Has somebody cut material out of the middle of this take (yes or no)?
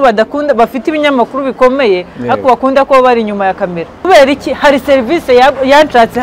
yes